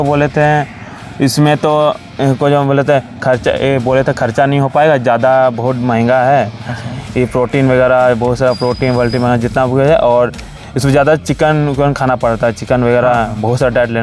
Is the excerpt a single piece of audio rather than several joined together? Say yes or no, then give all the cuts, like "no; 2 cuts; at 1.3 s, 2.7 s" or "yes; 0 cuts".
yes; 0 cuts